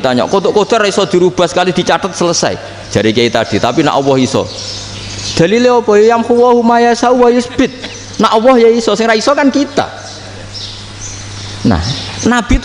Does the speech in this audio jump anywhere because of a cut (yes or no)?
no